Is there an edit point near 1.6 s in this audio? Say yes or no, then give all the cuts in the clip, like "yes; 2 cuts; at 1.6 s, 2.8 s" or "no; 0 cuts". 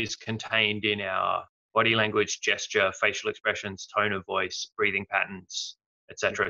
yes; 1 cut; at 1.6 s